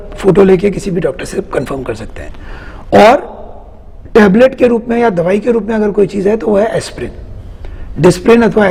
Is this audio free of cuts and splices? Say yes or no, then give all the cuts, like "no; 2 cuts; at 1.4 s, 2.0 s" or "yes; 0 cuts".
yes; 0 cuts